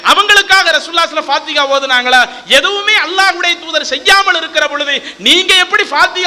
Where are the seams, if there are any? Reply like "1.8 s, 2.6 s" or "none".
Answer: none